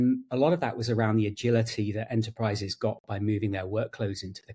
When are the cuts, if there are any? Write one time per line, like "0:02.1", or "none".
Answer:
none